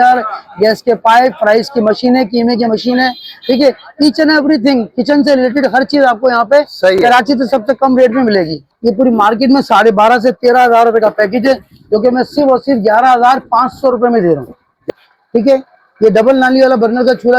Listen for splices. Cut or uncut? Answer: cut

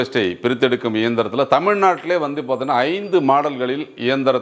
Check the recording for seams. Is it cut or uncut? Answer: uncut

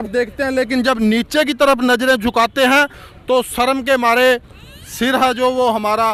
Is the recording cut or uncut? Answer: uncut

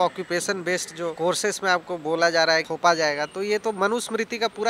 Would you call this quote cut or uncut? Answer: cut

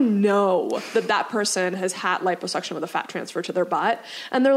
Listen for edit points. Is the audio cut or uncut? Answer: uncut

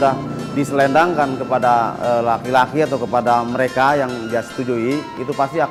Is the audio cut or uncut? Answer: uncut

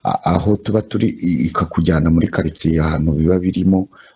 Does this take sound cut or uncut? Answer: uncut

